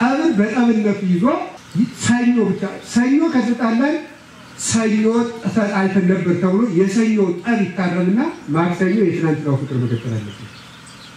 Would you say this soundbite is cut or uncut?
cut